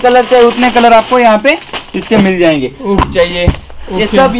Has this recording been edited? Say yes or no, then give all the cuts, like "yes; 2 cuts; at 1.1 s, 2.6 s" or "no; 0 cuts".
yes; 1 cut; at 3.0 s